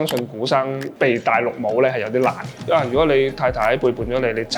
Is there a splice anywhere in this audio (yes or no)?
yes